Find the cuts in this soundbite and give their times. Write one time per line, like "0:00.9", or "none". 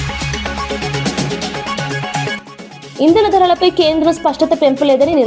0:02.3